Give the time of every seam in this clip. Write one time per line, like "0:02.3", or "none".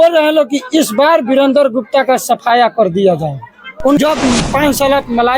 0:04.0